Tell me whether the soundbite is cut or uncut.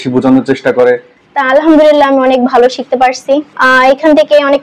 cut